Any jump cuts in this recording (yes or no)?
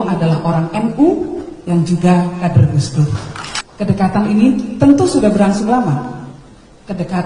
no